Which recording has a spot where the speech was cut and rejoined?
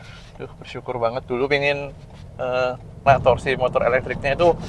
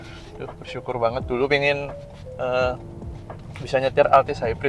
first; 1 cut; at 2.9 s

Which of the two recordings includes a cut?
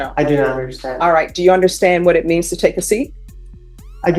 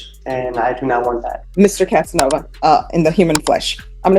second; 2 cuts; at 1.4 s, 2.5 s

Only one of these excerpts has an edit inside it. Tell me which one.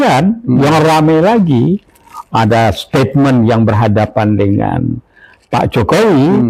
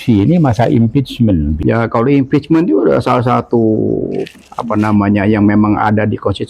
second; 2 cuts; at 1.6 s, 4.4 s

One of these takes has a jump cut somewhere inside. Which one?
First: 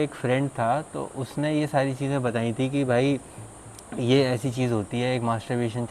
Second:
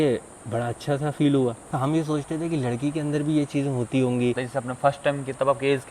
second; 2 cuts; at 1.7 s, 4.4 s

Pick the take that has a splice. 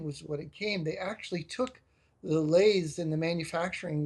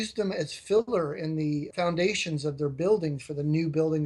second; 1 cut; at 1.7 s

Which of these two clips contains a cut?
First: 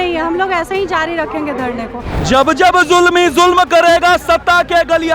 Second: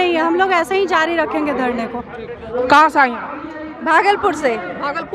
first; 1 cut; at 2.1 s

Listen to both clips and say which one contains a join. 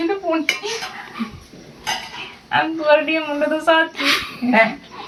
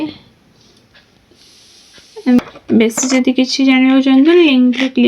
second; 1 cut; at 2.4 s

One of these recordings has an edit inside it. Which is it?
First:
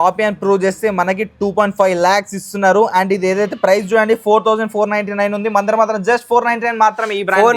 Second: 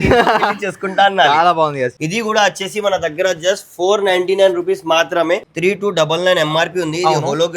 second; 2 cuts; at 1.9 s, 5.5 s

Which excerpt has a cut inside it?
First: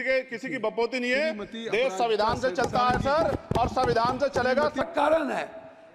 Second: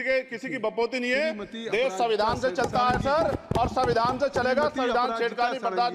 first; 1 cut; at 4.8 s

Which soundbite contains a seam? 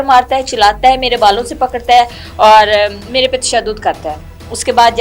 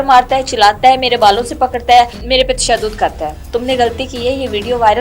second; 2 cuts; at 2.2 s, 3.4 s

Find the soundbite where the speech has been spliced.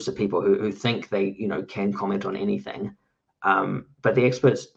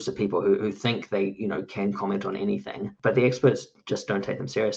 second; 1 cut; at 2.9 s

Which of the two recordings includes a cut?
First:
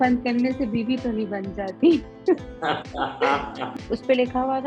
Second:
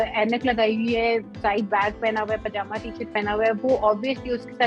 first; 1 cut; at 3.7 s

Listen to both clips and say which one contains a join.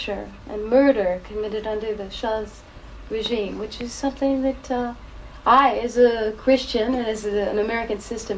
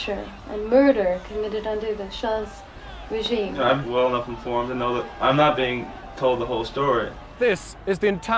second; 3 cuts; at 3.8 s, 5.1 s, 7.4 s

